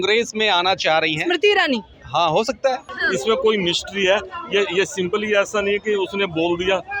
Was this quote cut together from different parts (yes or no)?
yes